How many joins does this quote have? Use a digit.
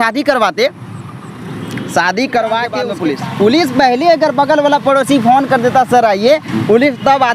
1